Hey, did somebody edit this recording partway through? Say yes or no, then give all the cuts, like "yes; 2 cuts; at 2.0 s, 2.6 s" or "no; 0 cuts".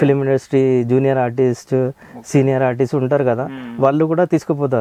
no; 0 cuts